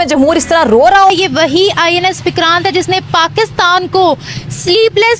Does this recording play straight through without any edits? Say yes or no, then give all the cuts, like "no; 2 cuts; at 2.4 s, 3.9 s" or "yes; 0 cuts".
no; 1 cut; at 1.1 s